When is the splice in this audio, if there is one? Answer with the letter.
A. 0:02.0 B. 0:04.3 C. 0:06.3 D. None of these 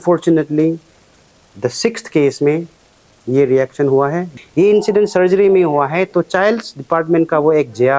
B